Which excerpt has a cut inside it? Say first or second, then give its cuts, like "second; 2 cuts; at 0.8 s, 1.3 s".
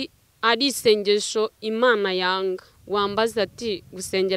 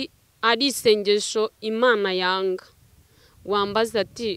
first; 1 cut; at 2.7 s